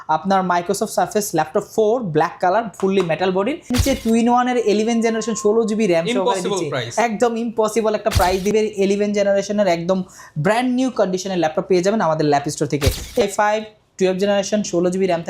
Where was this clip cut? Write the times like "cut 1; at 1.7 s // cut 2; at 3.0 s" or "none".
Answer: cut 1; at 3.7 s // cut 2; at 8.5 s // cut 3; at 13.2 s